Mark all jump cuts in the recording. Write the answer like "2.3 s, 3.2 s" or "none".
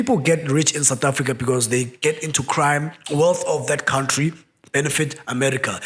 3.0 s